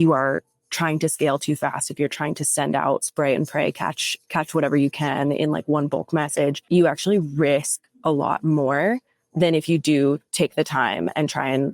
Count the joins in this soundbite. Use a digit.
2